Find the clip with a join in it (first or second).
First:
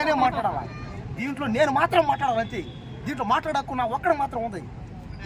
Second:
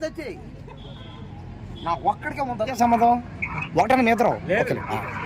second